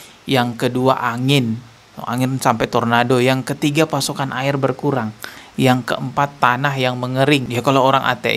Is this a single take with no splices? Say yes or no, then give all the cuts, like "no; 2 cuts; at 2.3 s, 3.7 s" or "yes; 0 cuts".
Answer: no; 1 cut; at 7.4 s